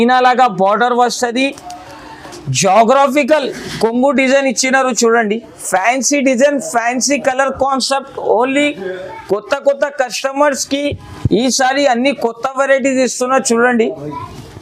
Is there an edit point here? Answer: no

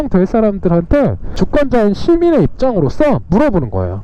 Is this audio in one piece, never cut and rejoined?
no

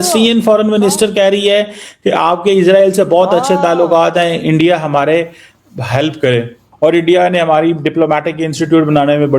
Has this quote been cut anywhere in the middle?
yes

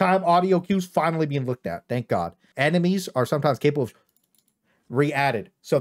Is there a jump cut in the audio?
yes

